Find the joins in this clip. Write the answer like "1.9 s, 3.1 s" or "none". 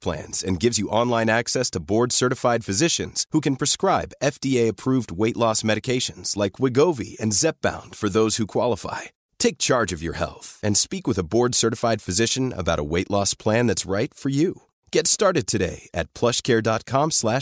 none

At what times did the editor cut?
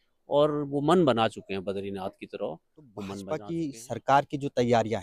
3.2 s

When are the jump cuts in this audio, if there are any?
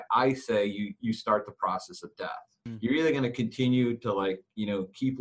2.6 s

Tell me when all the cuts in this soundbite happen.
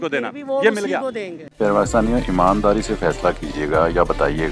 1.3 s

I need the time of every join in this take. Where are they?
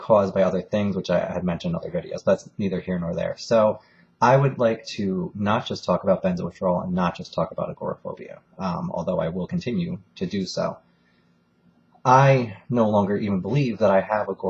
12.6 s

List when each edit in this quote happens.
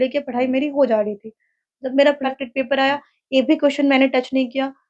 2.2 s

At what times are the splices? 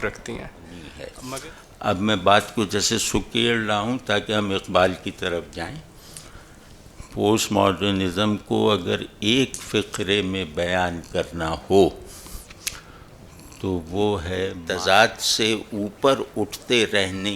1.1 s, 14.5 s

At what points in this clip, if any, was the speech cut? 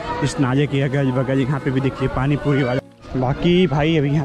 2.9 s

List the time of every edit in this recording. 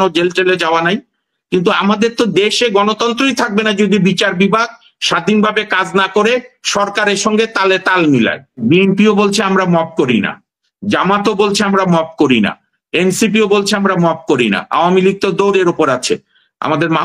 8.6 s

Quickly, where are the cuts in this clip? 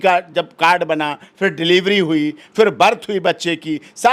none

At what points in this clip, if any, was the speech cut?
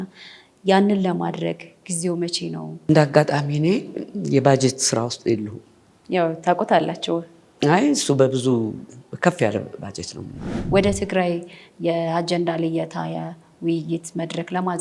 2.8 s, 10.6 s

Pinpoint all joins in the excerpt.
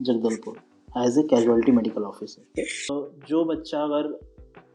2.9 s

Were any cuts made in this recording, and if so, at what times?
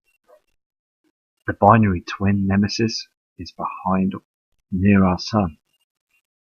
2.1 s

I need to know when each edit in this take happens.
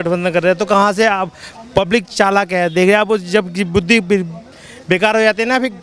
none

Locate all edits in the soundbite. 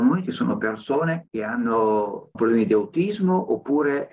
1.3 s, 2.3 s

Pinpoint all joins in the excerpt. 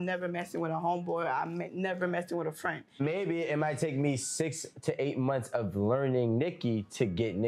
3.0 s

